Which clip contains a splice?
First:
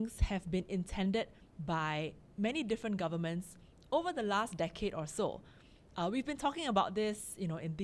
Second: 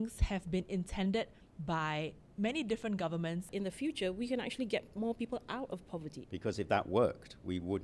second; 2 cuts; at 3.5 s, 6.1 s

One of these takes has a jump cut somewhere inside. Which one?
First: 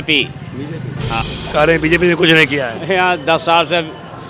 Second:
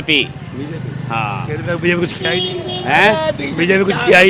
first; 1 cut; at 1.3 s

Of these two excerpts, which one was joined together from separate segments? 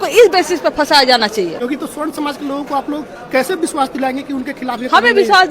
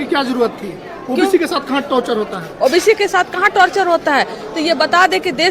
first; 1 cut; at 1.5 s

